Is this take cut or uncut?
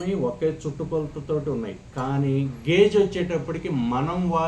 uncut